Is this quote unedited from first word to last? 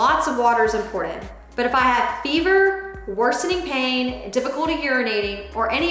yes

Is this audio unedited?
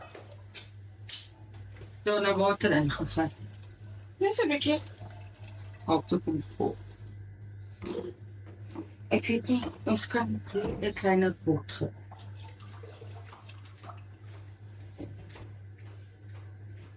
yes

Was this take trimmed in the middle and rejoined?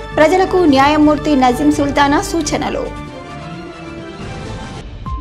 no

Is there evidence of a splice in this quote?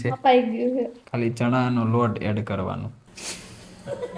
yes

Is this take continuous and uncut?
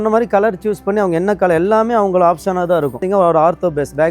no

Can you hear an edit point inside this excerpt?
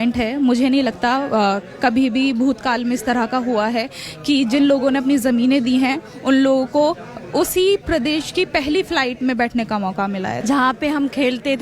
yes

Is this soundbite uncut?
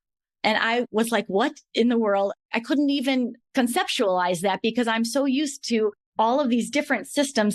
yes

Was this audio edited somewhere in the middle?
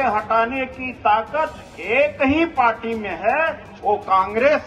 no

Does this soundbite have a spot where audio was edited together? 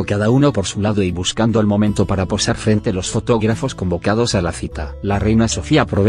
no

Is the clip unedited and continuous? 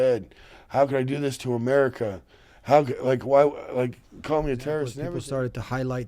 no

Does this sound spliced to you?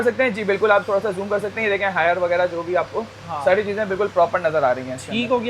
no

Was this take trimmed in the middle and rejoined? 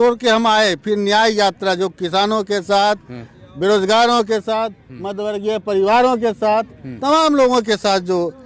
no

